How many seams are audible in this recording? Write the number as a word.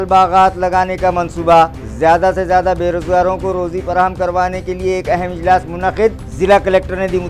zero